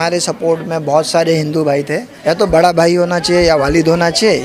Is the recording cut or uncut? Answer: cut